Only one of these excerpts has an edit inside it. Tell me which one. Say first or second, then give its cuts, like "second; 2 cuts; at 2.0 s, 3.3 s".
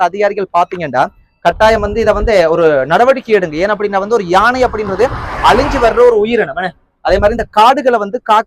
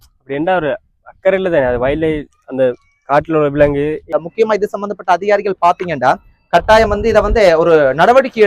second; 1 cut; at 4.1 s